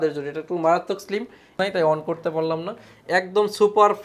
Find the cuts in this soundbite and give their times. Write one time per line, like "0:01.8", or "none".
0:01.5